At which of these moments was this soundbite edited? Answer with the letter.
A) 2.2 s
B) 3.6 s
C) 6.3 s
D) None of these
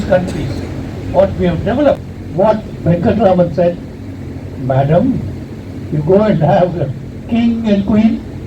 A